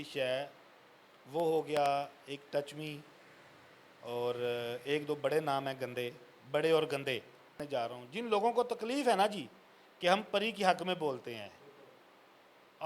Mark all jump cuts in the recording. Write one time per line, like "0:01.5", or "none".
0:07.5